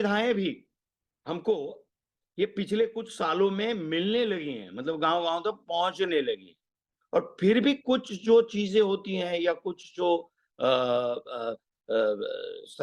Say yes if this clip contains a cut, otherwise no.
no